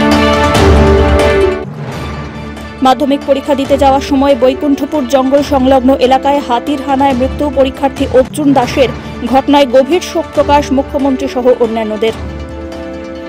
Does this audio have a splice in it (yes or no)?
yes